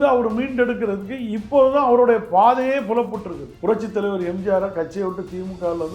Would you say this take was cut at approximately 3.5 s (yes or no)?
yes